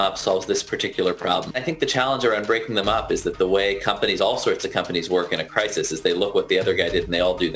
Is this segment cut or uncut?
cut